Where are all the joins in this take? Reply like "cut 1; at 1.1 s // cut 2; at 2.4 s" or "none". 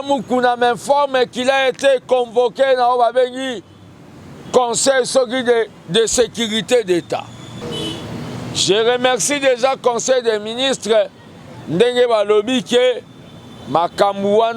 cut 1; at 7.6 s